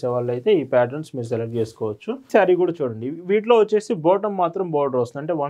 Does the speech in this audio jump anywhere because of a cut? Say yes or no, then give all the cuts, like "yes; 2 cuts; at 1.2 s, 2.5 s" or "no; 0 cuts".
yes; 1 cut; at 2.3 s